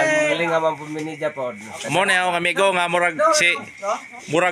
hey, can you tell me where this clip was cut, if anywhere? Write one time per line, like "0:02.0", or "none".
none